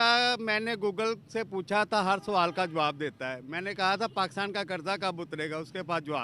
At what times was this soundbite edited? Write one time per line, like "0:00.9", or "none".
none